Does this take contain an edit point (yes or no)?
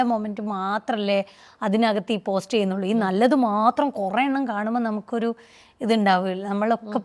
no